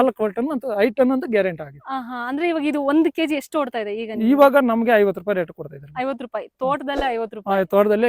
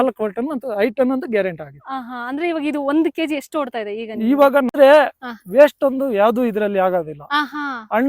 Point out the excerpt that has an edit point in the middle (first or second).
second